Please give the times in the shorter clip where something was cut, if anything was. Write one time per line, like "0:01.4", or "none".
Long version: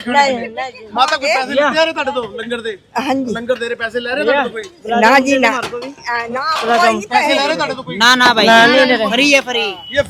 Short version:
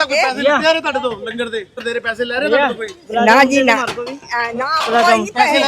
0:01.8